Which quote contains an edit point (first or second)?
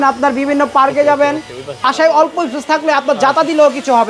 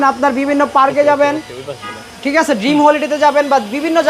first